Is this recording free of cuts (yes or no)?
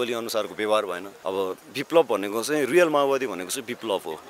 no